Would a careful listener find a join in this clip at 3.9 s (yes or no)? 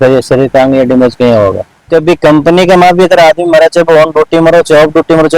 no